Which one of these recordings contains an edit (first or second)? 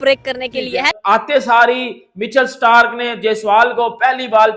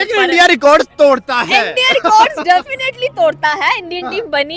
first